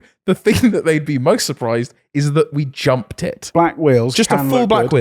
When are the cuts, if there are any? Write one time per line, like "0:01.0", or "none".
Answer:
0:03.4